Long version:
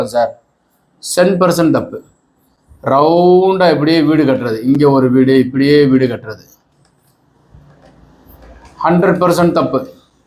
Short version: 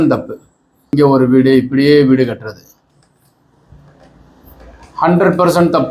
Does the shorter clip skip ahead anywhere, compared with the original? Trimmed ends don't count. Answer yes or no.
yes